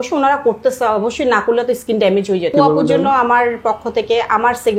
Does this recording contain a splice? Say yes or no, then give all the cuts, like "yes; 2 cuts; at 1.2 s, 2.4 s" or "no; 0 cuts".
yes; 1 cut; at 2.5 s